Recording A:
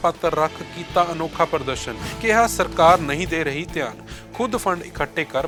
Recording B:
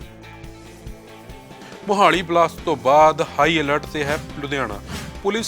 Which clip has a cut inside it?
B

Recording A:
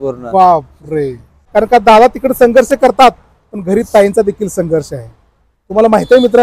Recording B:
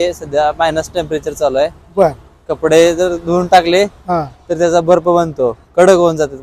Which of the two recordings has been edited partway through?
A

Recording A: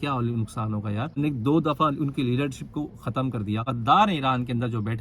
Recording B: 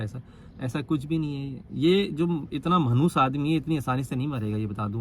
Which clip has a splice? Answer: A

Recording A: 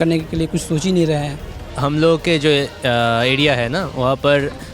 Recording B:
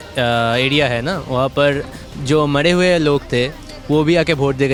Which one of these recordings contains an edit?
A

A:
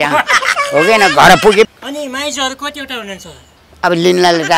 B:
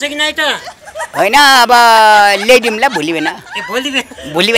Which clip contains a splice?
A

